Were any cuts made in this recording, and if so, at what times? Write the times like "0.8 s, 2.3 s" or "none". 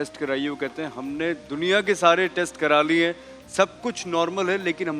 none